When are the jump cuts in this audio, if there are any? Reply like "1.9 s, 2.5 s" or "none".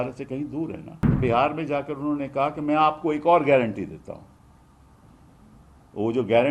1.2 s